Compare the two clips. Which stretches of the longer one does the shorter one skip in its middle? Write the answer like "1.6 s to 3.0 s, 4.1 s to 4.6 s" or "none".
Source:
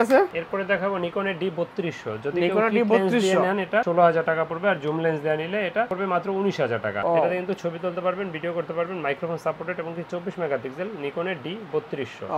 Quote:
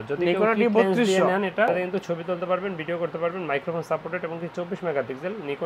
3.8 s to 7.2 s